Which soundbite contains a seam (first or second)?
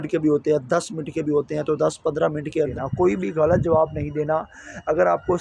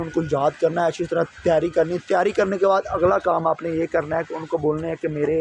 first